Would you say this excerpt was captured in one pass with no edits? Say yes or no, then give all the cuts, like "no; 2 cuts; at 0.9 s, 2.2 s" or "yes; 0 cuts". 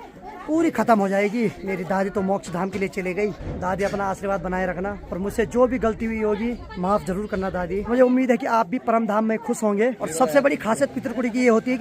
no; 6 cuts; at 1.6 s, 3.5 s, 5.0 s, 6.7 s, 7.9 s, 10.0 s